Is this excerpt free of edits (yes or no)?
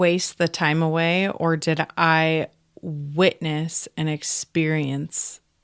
yes